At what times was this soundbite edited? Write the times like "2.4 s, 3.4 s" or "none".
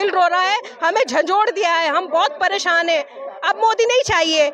none